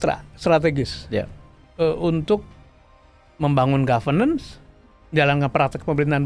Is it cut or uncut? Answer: uncut